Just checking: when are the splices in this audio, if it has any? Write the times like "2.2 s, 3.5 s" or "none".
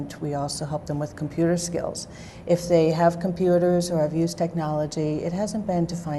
4.6 s